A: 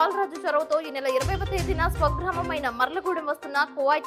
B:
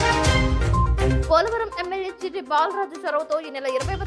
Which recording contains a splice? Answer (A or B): B